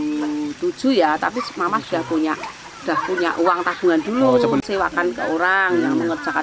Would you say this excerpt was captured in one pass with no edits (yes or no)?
no